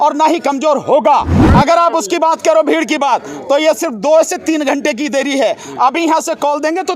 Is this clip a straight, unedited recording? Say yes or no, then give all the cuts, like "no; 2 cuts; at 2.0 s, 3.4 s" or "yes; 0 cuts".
no; 1 cut; at 1.4 s